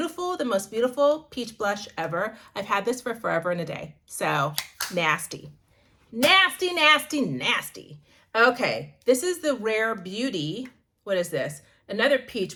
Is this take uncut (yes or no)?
yes